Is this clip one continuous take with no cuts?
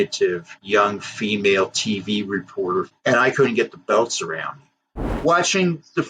no; 2 cuts; at 2.9 s, 5.0 s

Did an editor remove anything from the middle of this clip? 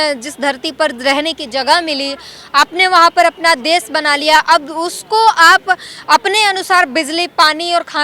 no; 0 cuts

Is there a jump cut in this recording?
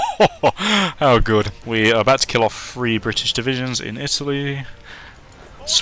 yes; 1 cut; at 1.6 s

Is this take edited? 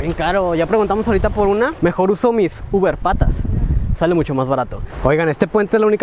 yes; 2 cuts; at 1.7 s, 4.8 s

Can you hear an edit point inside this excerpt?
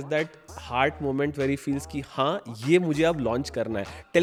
no; 0 cuts

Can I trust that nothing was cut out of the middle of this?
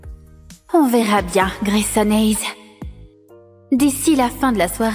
yes; 0 cuts

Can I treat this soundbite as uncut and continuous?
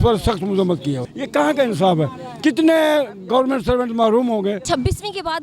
no; 2 cuts; at 1.1 s, 4.6 s

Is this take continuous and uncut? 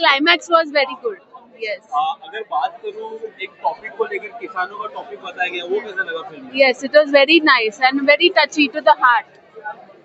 yes; 0 cuts

